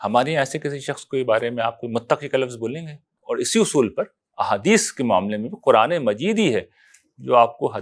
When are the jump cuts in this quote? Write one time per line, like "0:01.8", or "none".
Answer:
0:03.1